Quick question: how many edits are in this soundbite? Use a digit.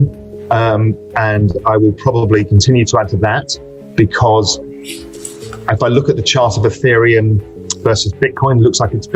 0